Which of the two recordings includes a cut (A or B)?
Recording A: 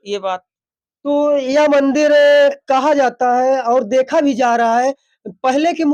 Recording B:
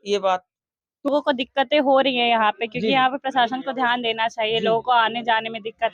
B